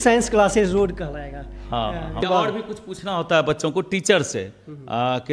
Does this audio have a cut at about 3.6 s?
no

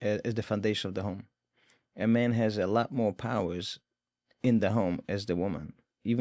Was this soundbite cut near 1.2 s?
no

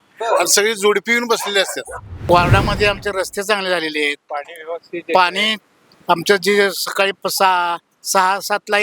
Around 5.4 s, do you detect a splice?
no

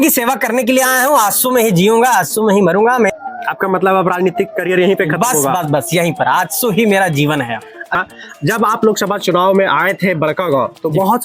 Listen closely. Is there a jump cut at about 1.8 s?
no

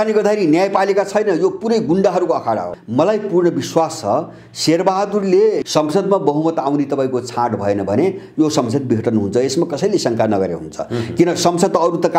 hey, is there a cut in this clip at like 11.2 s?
no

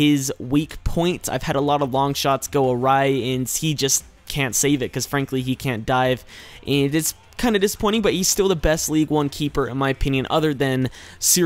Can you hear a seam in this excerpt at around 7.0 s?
no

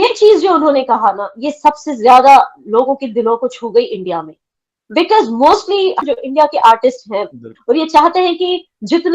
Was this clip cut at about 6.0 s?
yes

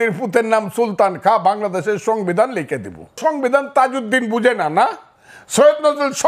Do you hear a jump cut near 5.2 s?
no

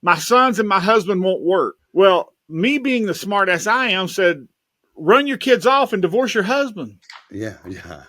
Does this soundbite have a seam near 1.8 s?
yes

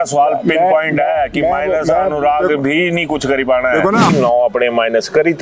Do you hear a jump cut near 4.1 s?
yes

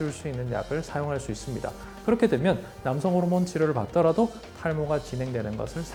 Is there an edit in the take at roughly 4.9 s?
no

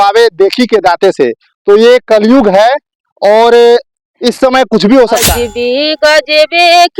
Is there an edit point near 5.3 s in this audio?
yes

